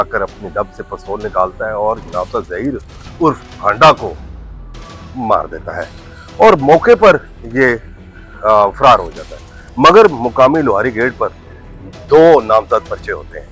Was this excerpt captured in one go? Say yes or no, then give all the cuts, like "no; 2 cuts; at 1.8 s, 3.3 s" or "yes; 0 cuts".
yes; 0 cuts